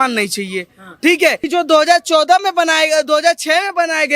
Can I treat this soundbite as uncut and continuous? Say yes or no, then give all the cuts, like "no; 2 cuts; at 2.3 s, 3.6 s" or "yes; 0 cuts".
no; 1 cut; at 1.4 s